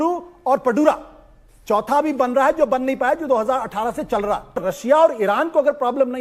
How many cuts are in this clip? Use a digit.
1